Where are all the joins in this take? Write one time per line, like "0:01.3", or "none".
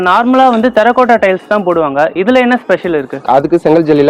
0:03.1